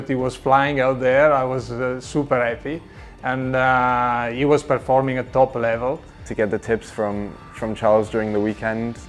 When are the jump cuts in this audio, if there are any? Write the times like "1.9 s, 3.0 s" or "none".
none